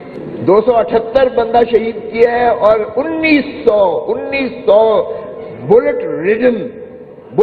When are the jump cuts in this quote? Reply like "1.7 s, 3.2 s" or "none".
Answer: none